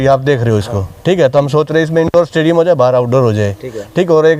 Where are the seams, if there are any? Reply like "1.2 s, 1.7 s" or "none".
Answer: none